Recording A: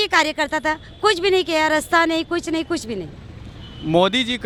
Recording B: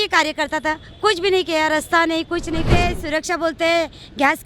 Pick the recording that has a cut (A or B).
B